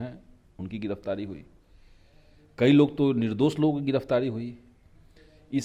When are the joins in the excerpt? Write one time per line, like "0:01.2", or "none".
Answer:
none